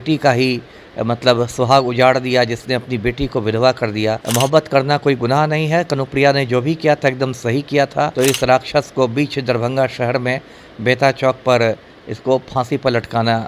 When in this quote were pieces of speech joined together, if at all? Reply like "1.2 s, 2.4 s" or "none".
4.2 s, 8.1 s